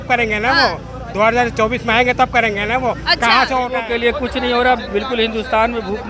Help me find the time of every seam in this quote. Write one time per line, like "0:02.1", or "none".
0:03.8